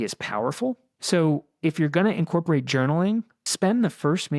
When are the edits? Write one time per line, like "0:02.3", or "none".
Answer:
0:00.9
0:03.4